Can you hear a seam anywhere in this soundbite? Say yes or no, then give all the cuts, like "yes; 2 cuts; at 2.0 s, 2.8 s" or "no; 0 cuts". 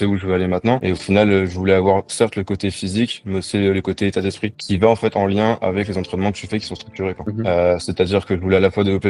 yes; 3 cuts; at 0.8 s, 4.6 s, 7.2 s